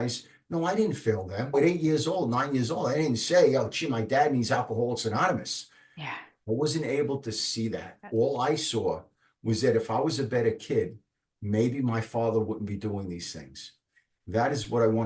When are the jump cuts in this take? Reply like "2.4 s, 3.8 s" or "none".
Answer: 1.5 s